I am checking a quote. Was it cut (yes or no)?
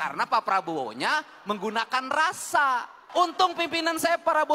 yes